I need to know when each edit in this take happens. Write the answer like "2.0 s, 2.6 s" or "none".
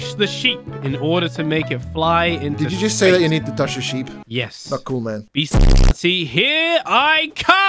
4.2 s, 5.3 s